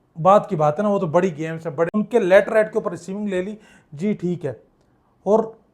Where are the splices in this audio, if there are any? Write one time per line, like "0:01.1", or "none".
0:01.9